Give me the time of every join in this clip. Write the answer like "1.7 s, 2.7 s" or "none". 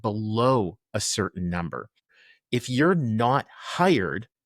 2.0 s